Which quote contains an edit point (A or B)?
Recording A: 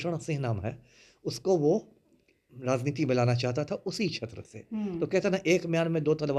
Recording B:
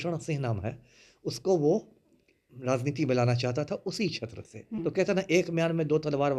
B